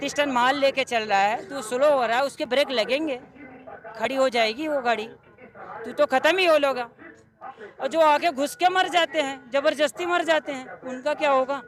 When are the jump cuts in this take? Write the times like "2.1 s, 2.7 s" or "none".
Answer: none

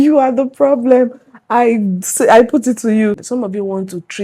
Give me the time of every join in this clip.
3.2 s

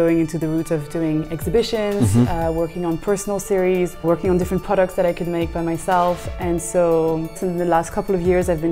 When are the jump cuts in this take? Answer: 4.0 s, 7.4 s

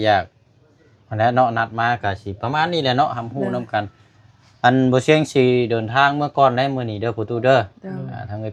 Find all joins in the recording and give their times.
none

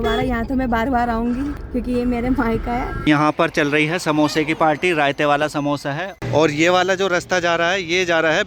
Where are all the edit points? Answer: 1.6 s, 2.9 s, 6.2 s

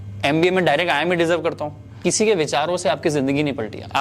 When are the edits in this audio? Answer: 2.0 s

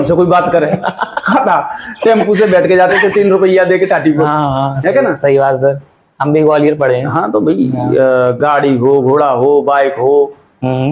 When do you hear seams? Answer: none

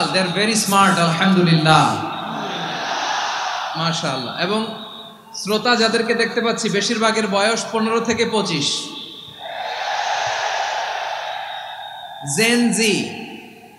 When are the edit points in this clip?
none

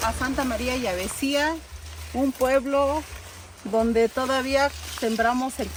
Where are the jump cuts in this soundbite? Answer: none

